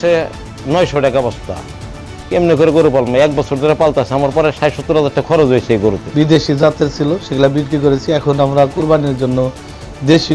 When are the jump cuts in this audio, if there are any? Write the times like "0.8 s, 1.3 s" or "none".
6.0 s